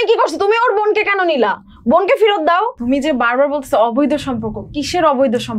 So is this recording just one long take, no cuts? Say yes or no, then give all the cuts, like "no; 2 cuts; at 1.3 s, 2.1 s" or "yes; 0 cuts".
no; 1 cut; at 2.8 s